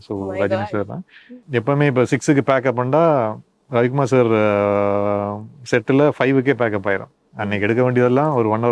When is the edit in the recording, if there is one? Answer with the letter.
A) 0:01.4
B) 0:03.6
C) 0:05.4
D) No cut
A